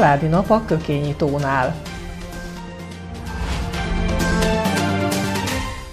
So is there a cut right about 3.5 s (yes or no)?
no